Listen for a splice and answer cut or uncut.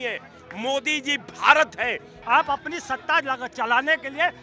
cut